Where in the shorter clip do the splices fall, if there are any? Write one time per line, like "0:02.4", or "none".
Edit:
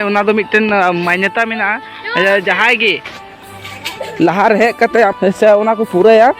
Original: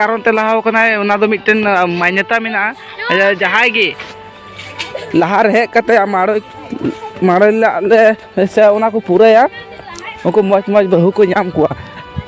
0:05.1